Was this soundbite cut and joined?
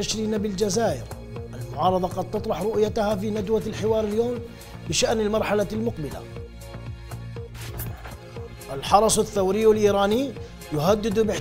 yes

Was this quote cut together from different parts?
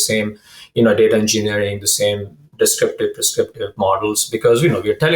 no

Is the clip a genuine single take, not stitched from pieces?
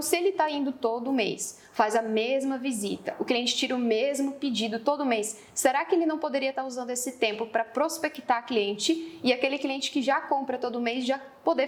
yes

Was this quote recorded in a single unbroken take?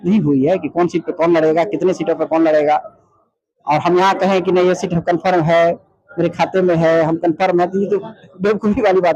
yes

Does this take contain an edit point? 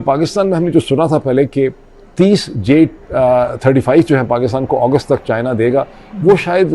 no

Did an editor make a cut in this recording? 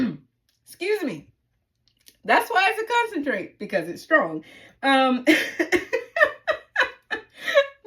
no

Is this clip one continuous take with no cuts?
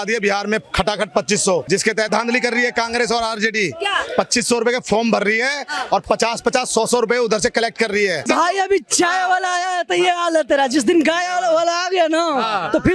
no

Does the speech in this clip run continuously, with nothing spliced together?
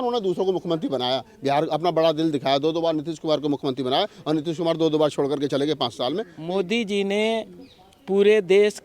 no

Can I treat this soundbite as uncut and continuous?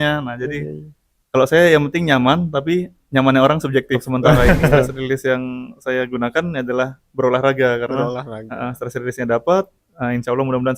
no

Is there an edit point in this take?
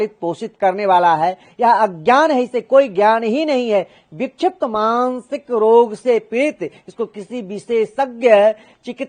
no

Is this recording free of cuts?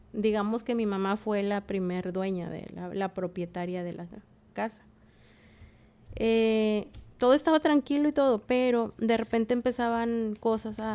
yes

